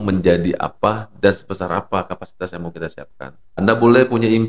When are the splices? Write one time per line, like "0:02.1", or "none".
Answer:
0:03.4